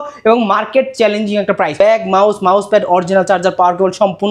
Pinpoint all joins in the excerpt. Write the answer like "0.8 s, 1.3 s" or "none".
1.7 s